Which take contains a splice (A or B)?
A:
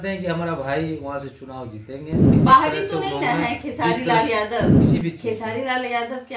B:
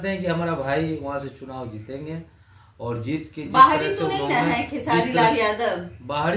A